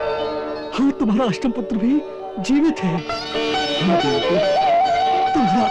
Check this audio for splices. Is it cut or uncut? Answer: uncut